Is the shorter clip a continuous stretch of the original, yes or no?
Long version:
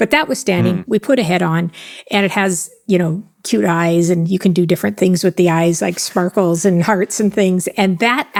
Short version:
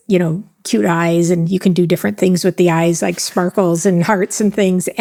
yes